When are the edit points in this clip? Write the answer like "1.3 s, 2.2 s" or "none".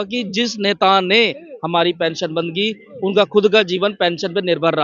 none